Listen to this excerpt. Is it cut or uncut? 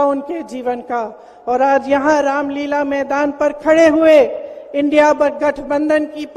uncut